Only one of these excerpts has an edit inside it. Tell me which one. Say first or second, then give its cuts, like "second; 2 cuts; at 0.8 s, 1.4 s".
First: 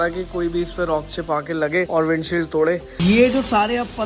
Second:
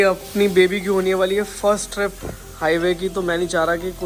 first; 2 cuts; at 1.9 s, 2.9 s